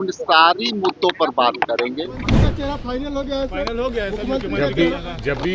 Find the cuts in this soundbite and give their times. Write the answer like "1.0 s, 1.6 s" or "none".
2.4 s